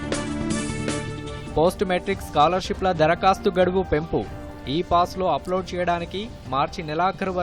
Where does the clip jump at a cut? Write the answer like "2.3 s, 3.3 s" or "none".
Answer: 1.4 s